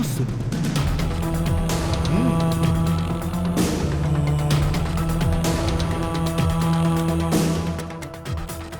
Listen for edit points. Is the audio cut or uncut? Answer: uncut